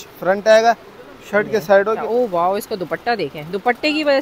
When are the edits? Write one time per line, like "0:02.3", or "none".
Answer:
0:02.0